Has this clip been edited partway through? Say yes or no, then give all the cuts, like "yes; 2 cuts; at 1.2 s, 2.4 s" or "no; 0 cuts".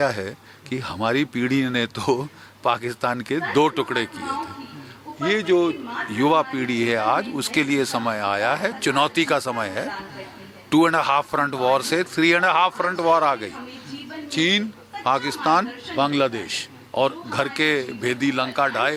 no; 0 cuts